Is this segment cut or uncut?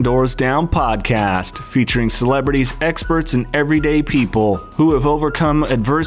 uncut